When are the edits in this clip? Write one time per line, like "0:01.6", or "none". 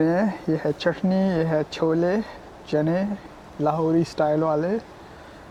none

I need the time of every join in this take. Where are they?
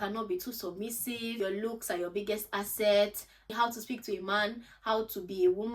0:01.4
0:03.5

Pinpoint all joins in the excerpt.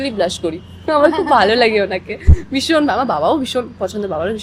none

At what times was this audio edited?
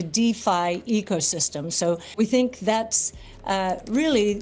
0:02.1

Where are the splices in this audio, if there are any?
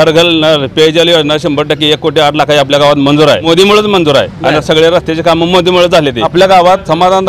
0:03.4
0:06.2

